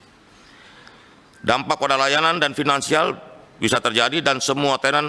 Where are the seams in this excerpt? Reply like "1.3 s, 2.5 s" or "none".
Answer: none

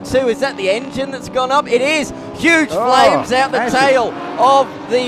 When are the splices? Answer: none

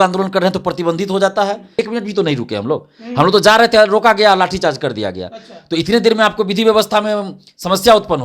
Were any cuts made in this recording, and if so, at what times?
1.8 s

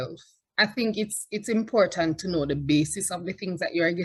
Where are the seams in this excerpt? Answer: none

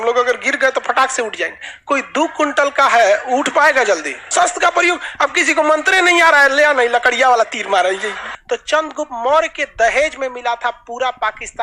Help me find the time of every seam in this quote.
4.2 s, 8.3 s

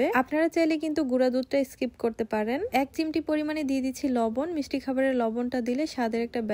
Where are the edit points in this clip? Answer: 2.7 s

